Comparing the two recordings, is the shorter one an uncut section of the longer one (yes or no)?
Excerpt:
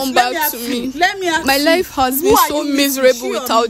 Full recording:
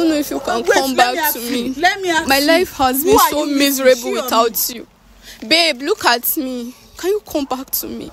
yes